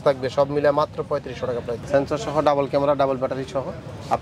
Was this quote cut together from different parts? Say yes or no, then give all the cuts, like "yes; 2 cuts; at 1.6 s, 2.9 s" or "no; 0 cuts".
yes; 1 cut; at 1.7 s